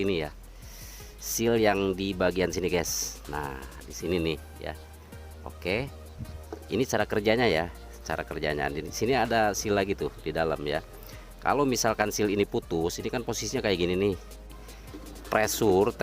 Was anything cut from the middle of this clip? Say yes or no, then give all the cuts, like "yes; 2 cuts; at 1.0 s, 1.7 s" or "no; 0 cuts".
yes; 1 cut; at 14.7 s